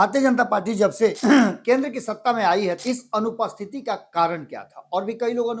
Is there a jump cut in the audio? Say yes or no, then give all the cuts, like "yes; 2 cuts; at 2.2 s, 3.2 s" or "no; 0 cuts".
yes; 2 cuts; at 1.2 s, 2.8 s